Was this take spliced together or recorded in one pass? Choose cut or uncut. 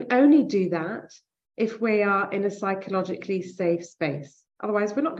uncut